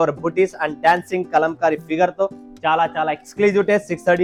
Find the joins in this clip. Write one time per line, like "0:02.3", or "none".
none